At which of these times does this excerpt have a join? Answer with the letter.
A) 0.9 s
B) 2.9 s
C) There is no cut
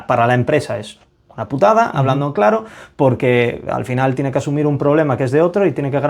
C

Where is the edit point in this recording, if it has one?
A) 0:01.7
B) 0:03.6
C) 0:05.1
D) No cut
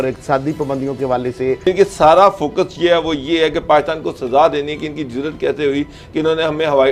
A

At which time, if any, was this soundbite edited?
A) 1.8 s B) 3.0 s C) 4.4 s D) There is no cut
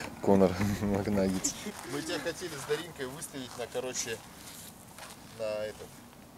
A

